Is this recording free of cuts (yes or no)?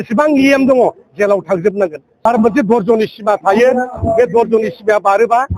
no